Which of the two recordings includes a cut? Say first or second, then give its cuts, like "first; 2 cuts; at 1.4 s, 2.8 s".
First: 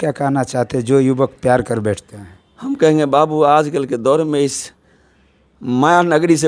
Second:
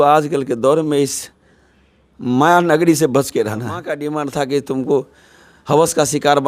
second; 1 cut; at 4.0 s